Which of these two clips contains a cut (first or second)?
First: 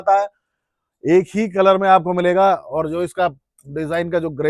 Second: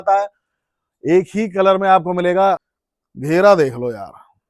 second